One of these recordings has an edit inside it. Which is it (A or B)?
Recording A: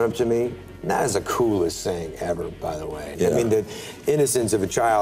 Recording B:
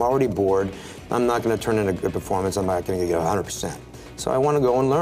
A